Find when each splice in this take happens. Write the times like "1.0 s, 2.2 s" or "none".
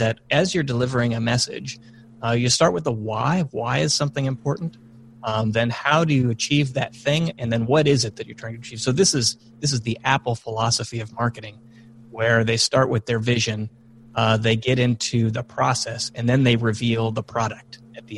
none